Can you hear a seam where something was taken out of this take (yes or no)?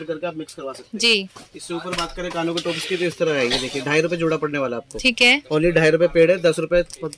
no